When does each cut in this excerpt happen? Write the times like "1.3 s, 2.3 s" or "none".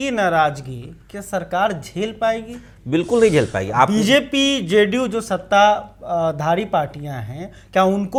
none